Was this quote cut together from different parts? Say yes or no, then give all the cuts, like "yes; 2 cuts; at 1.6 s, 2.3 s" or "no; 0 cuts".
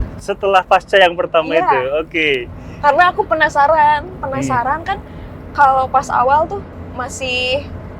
no; 0 cuts